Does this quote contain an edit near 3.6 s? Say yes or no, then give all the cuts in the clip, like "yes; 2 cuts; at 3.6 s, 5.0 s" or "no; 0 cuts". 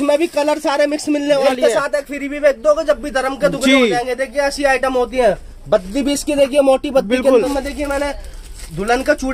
no; 2 cuts; at 1.5 s, 7.5 s